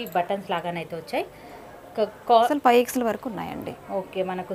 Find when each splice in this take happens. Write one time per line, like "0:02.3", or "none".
0:02.5